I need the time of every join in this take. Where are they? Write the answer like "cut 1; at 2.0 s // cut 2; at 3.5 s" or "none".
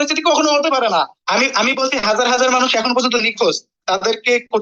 cut 1; at 1.2 s